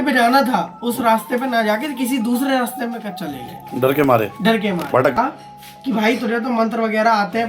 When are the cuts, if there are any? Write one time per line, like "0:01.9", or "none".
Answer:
0:05.2